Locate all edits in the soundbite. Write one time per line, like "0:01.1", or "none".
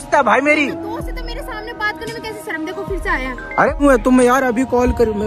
0:03.8